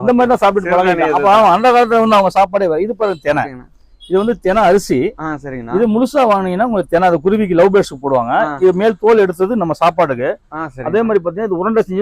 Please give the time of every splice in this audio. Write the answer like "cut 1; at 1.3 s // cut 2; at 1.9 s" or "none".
none

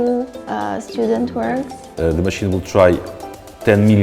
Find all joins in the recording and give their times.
cut 1; at 1.8 s

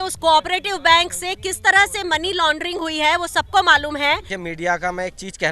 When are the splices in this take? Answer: cut 1; at 4.3 s

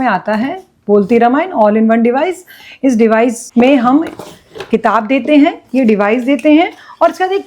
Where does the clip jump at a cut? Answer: cut 1; at 3.4 s

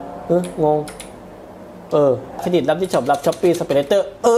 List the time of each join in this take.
cut 1; at 2.4 s

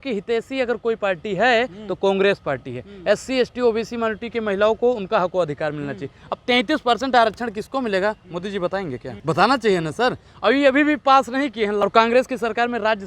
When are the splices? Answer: cut 1; at 9.1 s // cut 2; at 11.8 s

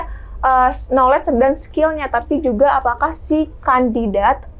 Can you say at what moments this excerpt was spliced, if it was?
none

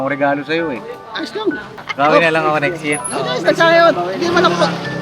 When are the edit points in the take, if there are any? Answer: cut 1; at 1.7 s

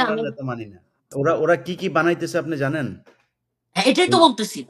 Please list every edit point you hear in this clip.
cut 1; at 1.1 s

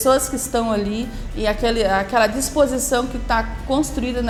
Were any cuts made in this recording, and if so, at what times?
none

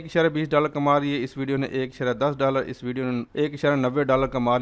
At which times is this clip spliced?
cut 1; at 3.3 s

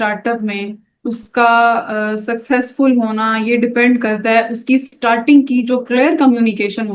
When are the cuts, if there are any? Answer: none

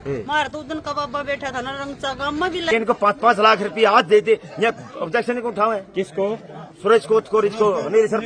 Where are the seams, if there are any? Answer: cut 1; at 2.7 s

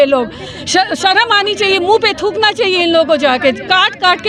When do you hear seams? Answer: none

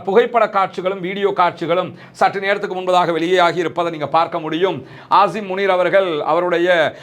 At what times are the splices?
none

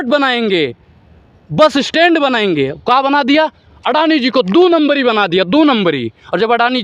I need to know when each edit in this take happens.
none

